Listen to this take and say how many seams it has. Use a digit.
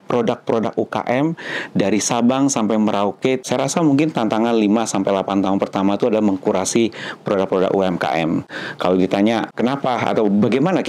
2